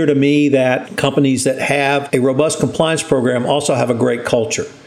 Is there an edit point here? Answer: yes; 2 cuts; at 0.9 s, 2.0 s

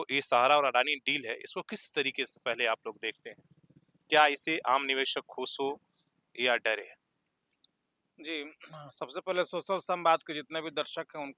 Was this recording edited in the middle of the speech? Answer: no; 0 cuts

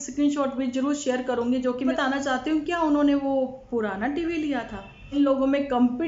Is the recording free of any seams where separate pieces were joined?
no; 2 cuts; at 1.9 s, 5.1 s

